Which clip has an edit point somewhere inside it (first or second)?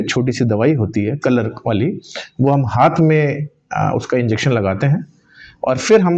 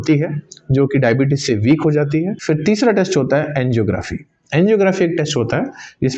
second